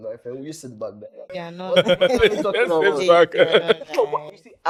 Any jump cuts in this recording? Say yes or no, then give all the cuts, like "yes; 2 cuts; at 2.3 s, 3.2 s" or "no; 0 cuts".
no; 0 cuts